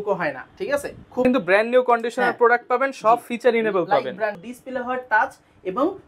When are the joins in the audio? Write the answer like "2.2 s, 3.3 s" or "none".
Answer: 1.2 s, 4.4 s